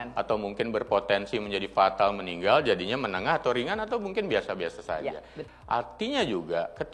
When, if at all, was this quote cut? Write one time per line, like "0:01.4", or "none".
0:05.3